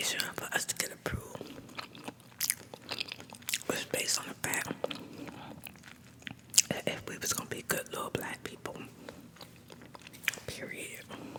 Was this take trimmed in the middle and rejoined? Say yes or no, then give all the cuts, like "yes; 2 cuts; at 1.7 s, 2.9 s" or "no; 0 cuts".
no; 0 cuts